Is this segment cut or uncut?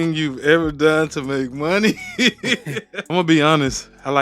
cut